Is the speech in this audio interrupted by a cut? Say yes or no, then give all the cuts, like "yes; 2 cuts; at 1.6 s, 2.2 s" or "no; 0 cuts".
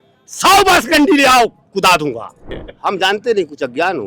yes; 1 cut; at 2.7 s